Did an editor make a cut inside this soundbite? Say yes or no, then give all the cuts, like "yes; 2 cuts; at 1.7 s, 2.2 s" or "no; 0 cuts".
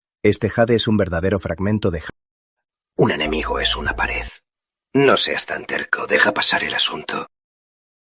yes; 1 cut; at 2.0 s